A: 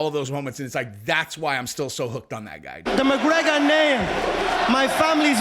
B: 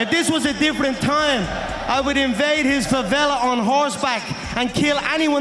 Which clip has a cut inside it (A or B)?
A